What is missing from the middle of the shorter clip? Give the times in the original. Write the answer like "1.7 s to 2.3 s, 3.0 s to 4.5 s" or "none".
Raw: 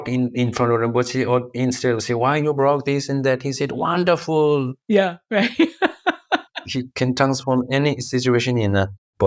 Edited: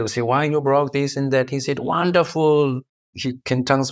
4.8 s to 6.4 s